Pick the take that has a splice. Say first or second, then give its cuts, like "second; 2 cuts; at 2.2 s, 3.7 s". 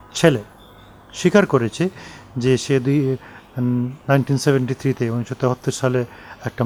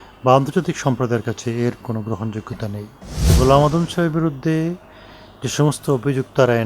second; 1 cut; at 3.3 s